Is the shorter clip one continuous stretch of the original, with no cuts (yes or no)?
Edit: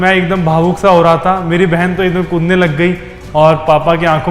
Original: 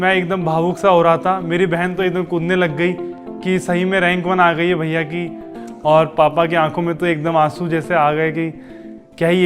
no